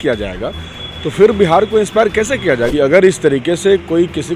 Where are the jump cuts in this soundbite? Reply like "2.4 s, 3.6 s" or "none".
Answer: 2.7 s